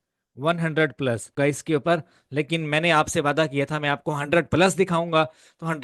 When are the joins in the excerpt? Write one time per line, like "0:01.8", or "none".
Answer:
0:01.3